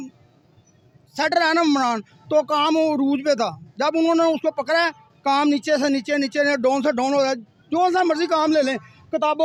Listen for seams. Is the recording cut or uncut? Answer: uncut